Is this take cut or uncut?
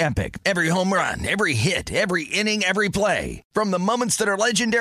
uncut